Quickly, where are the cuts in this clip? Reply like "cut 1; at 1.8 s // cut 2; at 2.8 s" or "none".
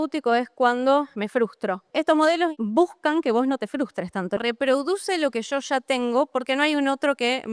cut 1; at 1.4 s // cut 2; at 2.5 s // cut 3; at 4.4 s